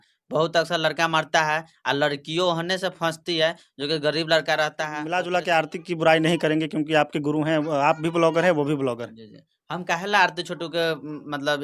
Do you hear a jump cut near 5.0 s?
yes; 1 cut; at 5.0 s

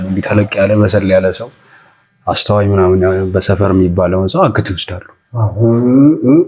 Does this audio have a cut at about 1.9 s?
no; 0 cuts

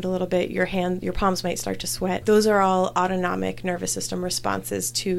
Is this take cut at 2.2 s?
yes; 1 cut; at 2.2 s

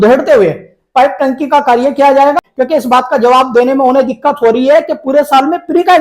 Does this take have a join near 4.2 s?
no; 1 cut; at 2.5 s

